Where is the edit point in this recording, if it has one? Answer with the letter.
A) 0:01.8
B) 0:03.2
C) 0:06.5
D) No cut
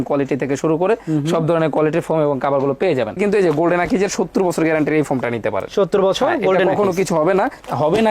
B